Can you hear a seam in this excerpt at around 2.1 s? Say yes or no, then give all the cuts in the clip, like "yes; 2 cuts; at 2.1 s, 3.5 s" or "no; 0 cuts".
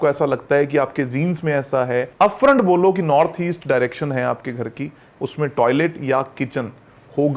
yes; 1 cut; at 2.1 s